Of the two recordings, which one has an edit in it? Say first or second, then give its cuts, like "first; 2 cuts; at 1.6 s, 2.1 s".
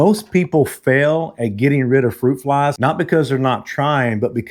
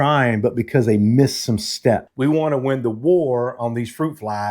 second; 1 cut; at 2.1 s